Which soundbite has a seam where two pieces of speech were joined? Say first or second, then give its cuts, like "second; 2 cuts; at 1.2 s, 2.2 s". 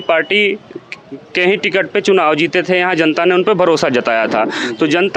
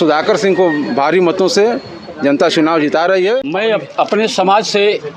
second; 1 cut; at 3.5 s